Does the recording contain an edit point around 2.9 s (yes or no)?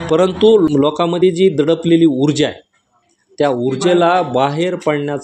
no